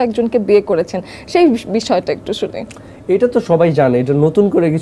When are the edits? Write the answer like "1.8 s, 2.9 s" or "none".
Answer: none